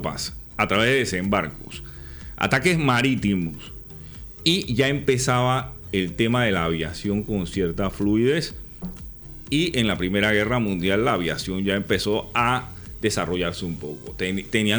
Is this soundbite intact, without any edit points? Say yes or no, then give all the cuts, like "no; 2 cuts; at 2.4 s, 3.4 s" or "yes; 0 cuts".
yes; 0 cuts